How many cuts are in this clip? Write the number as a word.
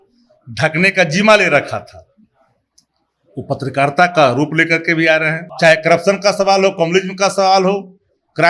one